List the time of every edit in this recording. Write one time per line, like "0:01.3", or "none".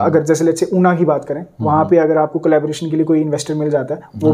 none